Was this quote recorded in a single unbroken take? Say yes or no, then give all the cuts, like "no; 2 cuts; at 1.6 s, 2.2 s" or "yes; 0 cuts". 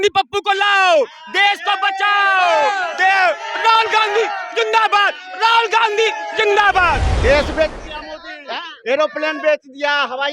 no; 1 cut; at 7.1 s